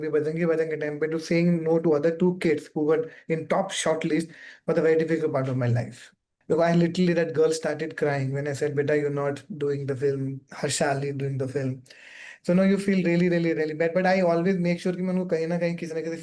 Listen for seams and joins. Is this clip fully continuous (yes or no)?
yes